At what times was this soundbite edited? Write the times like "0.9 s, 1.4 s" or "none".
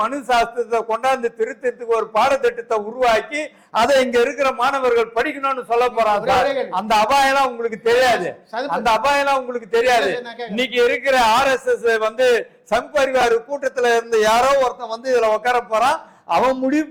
none